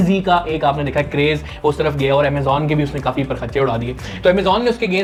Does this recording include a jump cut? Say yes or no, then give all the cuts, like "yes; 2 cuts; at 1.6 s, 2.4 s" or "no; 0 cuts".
no; 0 cuts